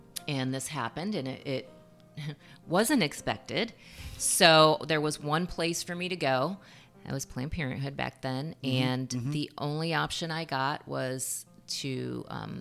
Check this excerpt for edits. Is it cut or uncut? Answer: uncut